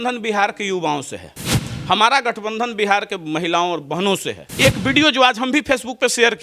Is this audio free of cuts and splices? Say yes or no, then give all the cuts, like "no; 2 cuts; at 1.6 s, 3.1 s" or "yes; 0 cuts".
no; 1 cut; at 4.4 s